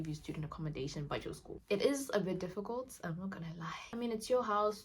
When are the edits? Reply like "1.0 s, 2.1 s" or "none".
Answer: 1.6 s, 3.9 s